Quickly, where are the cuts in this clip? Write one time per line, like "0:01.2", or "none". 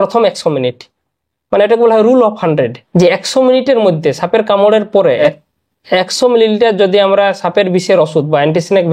0:02.8
0:05.2